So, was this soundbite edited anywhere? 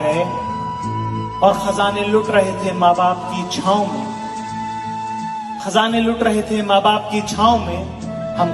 no; 0 cuts

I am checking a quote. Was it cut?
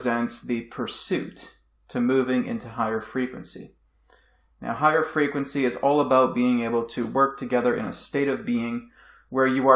yes; 1 cut; at 4.2 s

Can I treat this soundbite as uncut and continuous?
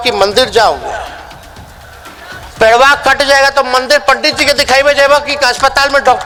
yes; 0 cuts

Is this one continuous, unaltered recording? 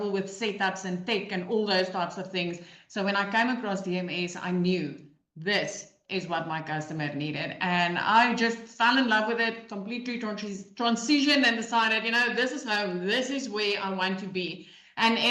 yes; 0 cuts

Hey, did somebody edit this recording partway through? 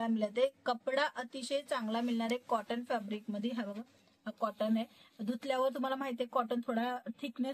no; 0 cuts

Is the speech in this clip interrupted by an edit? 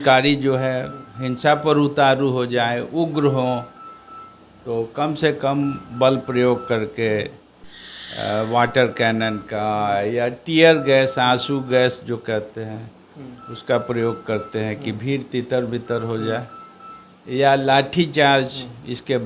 no; 0 cuts

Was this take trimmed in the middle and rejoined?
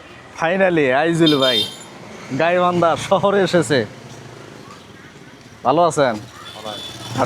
no; 0 cuts

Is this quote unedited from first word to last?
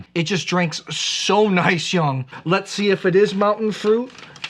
no; 1 cut; at 2.3 s

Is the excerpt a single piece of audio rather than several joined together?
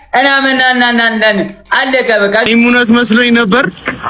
no; 1 cut; at 2.5 s

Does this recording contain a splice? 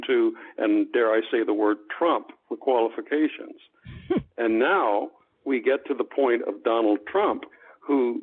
no; 0 cuts

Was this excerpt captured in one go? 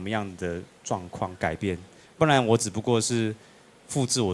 yes; 0 cuts

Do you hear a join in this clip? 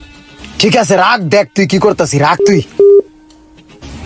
no; 0 cuts

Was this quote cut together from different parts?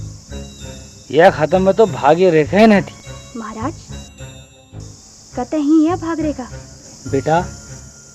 yes; 1 cut; at 2.9 s

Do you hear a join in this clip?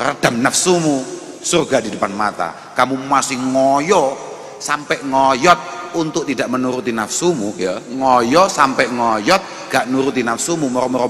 no; 0 cuts

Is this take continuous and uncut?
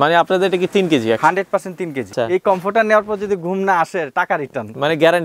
no; 1 cut; at 2.0 s

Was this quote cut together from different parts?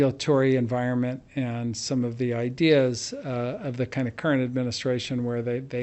no; 0 cuts

